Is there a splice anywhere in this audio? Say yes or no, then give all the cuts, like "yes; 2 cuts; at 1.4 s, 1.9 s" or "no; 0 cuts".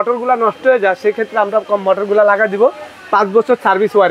no; 0 cuts